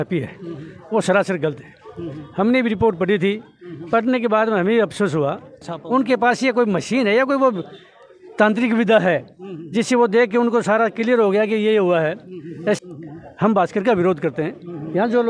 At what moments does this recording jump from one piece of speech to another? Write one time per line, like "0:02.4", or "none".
0:05.7
0:12.8